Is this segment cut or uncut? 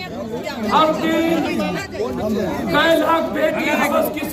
uncut